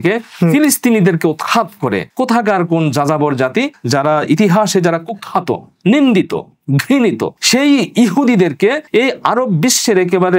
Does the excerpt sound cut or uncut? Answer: cut